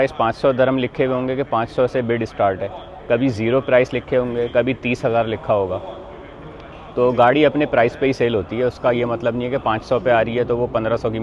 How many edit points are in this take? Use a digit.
0